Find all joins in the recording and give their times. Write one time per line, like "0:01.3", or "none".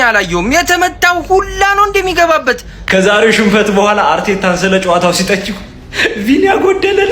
0:02.9